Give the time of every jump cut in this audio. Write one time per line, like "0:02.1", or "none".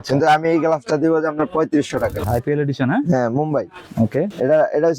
0:02.2